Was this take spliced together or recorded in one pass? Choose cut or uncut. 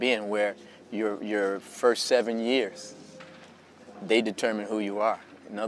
cut